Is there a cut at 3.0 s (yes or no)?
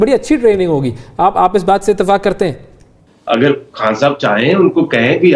yes